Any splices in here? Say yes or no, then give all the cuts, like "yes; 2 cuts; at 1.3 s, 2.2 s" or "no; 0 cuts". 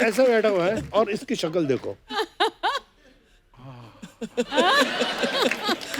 no; 0 cuts